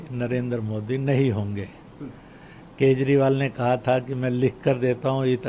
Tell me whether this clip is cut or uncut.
uncut